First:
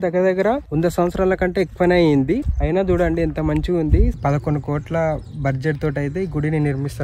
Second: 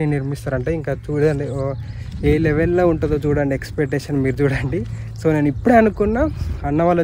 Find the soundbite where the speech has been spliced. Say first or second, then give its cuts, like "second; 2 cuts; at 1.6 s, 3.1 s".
first; 1 cut; at 4.1 s